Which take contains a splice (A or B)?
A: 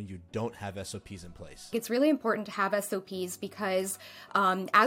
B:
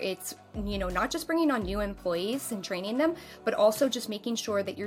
A